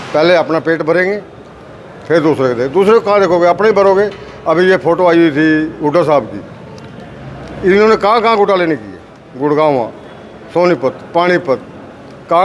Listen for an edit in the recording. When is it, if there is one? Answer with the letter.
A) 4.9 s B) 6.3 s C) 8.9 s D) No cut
D